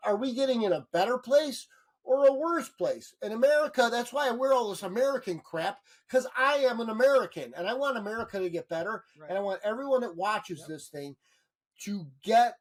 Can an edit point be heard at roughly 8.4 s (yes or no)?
no